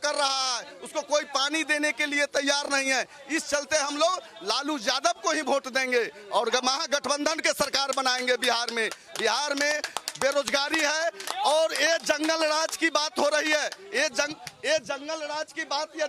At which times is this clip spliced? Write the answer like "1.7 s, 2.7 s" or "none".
none